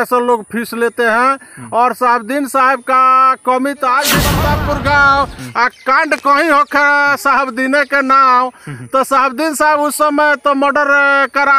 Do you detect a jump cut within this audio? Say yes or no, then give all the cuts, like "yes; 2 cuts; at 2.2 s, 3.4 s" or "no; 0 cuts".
yes; 1 cut; at 4.4 s